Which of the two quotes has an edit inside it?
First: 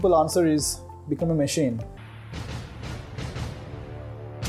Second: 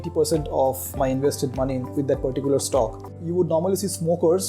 second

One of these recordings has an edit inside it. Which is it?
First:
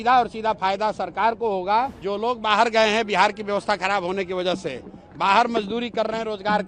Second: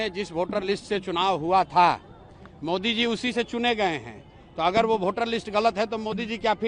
first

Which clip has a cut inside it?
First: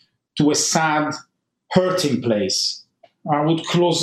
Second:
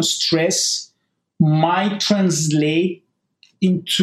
first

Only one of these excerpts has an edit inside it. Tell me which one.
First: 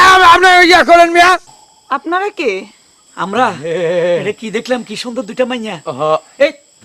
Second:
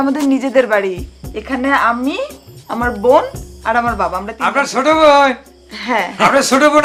first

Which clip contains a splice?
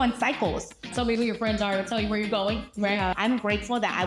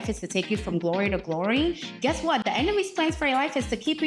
first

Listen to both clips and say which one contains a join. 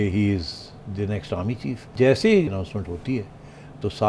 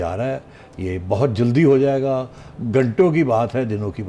first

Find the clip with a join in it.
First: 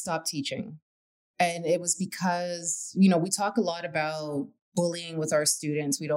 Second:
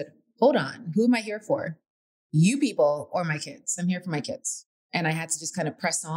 first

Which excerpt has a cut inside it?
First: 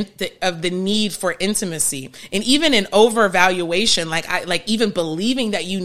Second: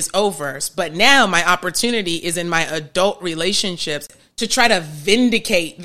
second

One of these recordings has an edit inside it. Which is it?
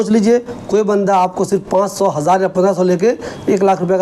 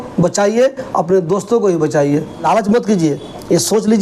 second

